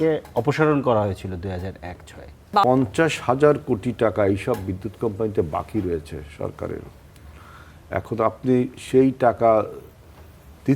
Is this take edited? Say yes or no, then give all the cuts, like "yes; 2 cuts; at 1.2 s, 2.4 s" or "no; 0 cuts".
yes; 1 cut; at 2.6 s